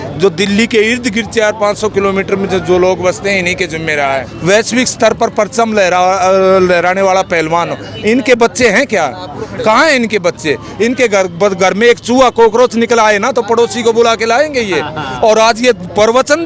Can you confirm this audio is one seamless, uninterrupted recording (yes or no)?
no